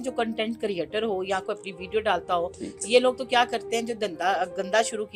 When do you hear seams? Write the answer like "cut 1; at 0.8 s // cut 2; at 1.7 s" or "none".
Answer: none